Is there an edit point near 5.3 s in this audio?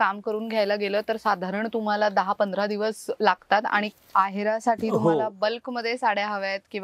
no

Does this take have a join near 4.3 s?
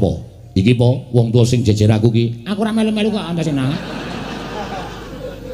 yes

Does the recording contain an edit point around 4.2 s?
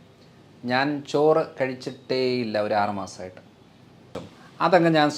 yes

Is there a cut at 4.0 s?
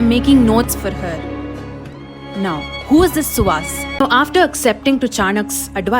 yes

